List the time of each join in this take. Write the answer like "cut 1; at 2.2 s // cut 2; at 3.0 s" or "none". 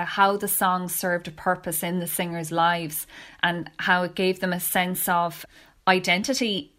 none